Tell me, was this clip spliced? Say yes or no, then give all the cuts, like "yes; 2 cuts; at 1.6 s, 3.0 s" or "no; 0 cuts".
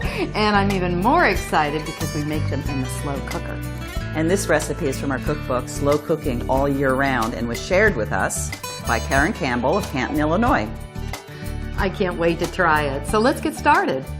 yes; 1 cut; at 3.8 s